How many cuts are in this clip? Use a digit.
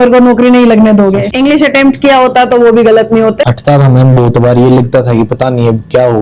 2